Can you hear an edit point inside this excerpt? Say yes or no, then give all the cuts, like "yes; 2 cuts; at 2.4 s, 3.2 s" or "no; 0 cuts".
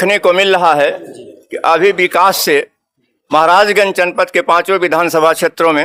no; 0 cuts